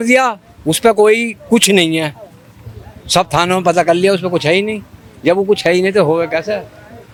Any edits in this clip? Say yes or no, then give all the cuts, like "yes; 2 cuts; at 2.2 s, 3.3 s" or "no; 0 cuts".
no; 0 cuts